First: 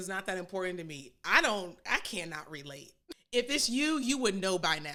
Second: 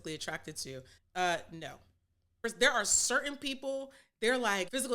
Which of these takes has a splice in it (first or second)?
second